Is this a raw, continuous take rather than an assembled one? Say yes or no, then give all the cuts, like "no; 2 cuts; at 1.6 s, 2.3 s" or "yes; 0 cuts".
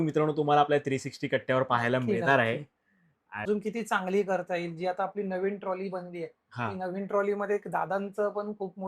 no; 1 cut; at 3.5 s